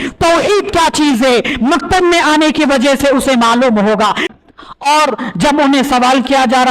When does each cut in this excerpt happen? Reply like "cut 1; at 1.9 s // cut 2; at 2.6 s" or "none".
cut 1; at 4.2 s